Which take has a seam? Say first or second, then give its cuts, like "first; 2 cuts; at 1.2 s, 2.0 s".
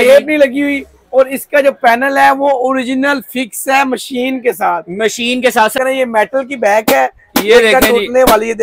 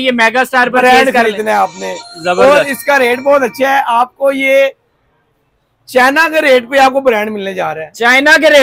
first; 1 cut; at 5.8 s